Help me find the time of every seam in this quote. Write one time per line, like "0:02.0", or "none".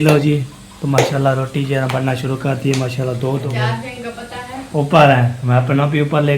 0:03.5